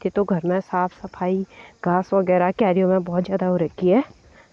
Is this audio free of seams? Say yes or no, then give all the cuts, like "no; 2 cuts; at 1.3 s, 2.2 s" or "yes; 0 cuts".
yes; 0 cuts